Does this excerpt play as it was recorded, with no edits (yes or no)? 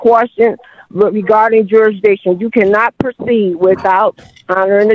yes